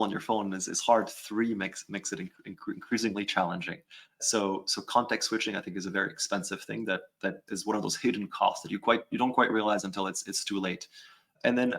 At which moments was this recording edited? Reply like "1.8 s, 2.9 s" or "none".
7.4 s